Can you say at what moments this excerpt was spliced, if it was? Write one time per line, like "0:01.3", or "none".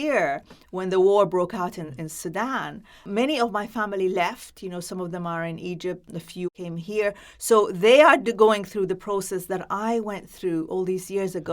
0:03.0
0:06.5